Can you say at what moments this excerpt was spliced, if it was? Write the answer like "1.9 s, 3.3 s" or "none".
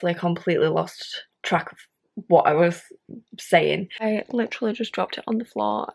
4.0 s